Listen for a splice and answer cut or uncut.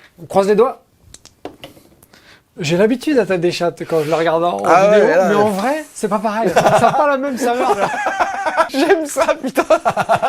cut